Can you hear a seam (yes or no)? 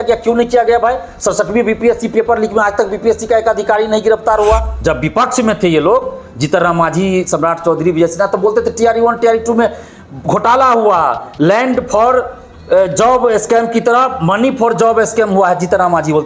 yes